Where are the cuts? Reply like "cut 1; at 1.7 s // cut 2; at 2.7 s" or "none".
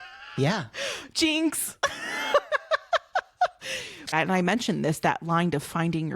cut 1; at 4.1 s